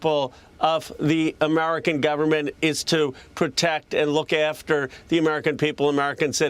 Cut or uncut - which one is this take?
uncut